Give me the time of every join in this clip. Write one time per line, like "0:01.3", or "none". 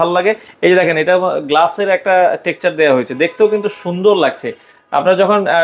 none